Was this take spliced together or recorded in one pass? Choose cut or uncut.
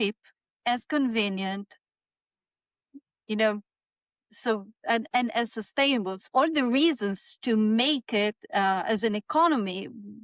cut